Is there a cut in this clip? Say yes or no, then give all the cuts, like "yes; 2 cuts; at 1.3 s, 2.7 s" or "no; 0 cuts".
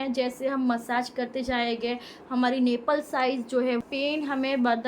yes; 1 cut; at 3.8 s